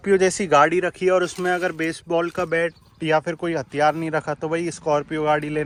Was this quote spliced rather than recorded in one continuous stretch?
no; 0 cuts

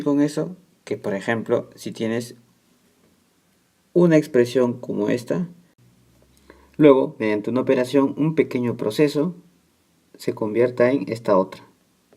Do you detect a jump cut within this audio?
no; 0 cuts

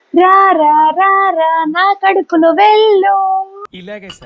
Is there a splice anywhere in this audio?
no; 0 cuts

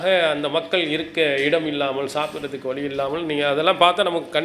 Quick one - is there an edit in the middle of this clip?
no; 0 cuts

